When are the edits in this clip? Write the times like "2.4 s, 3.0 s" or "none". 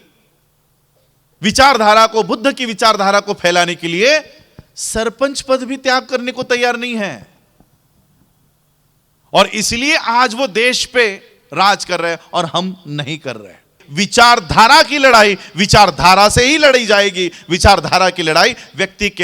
13.8 s